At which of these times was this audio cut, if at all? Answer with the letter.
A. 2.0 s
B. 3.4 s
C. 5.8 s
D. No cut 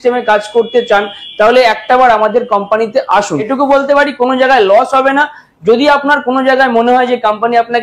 B